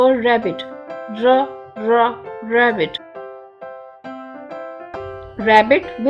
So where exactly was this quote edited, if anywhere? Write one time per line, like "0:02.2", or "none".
none